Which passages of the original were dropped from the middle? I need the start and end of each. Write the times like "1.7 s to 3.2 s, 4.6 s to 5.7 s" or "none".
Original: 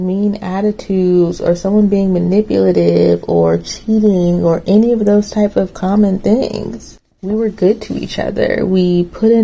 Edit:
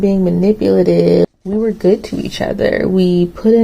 3.2 s to 7.1 s